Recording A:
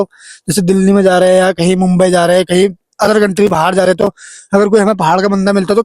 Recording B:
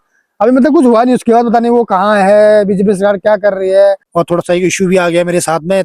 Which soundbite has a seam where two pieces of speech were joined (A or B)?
B